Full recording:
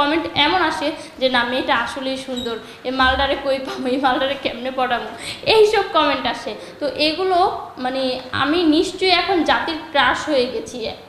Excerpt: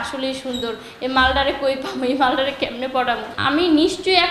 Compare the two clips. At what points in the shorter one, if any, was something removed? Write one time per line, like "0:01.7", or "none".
0:03.3